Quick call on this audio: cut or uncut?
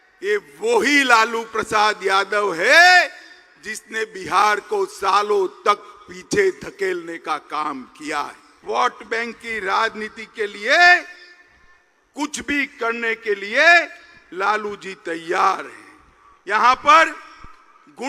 cut